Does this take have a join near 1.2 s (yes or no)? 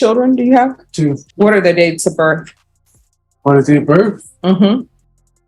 yes